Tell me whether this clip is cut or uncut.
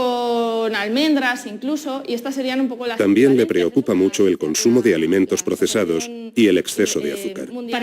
cut